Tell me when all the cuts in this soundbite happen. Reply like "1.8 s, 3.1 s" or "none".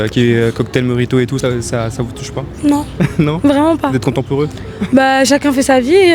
1.4 s